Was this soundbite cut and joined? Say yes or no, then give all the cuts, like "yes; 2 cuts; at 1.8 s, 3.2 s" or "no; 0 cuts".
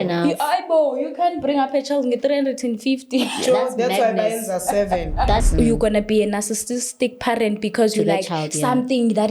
yes; 1 cut; at 5.5 s